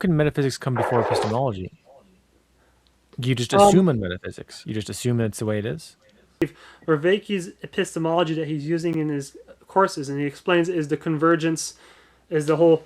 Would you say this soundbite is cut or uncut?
cut